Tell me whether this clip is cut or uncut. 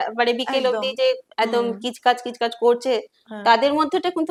uncut